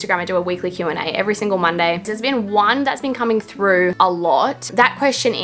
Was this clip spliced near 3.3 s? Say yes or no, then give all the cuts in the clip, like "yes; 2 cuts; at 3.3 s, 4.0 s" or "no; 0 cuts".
no; 2 cuts; at 2.0 s, 4.5 s